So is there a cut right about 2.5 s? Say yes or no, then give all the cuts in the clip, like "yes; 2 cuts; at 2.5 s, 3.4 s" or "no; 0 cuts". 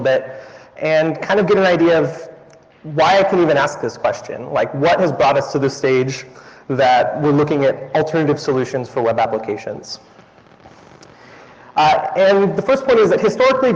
no; 1 cut; at 10.8 s